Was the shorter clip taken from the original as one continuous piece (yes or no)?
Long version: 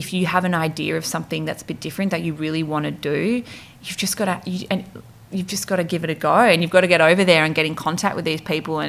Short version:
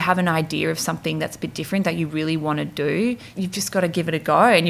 no